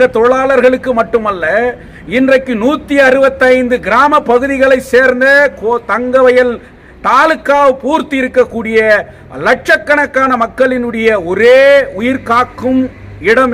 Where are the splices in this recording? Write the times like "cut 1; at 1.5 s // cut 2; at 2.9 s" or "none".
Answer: none